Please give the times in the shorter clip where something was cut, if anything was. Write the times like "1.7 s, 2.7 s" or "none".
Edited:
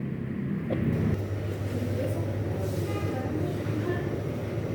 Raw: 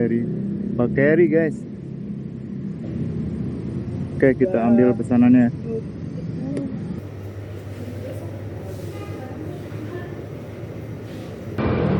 1.1 s